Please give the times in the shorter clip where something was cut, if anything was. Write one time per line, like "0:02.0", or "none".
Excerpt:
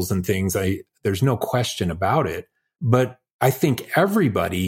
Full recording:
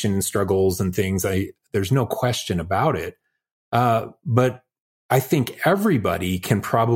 0:02.9